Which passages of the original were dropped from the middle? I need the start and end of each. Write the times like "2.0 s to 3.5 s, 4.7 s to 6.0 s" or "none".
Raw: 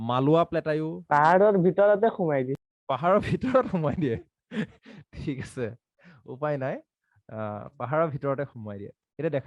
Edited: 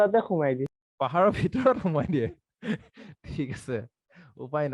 none